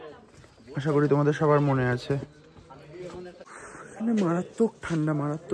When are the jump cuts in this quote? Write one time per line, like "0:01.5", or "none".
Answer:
0:03.4